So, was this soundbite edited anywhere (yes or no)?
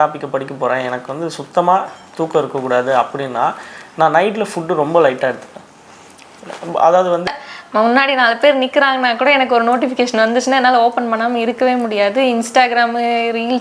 yes